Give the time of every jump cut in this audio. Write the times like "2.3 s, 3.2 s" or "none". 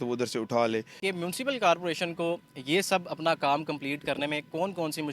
1.0 s